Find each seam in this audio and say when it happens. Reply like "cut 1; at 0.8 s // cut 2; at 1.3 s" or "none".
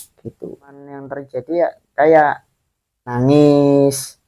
cut 1; at 1.2 s // cut 2; at 3.2 s